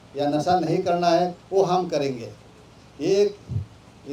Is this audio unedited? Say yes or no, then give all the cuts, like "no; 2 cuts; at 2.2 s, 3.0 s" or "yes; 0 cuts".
yes; 0 cuts